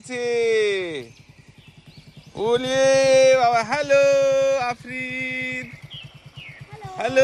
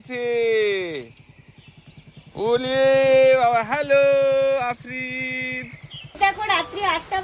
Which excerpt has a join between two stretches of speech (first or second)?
second